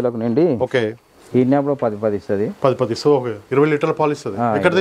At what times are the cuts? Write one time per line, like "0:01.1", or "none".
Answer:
0:01.1